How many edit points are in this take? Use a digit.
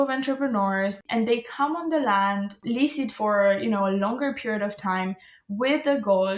1